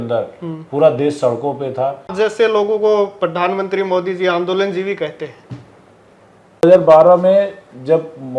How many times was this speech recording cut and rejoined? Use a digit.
2